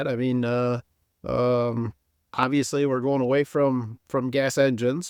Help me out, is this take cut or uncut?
uncut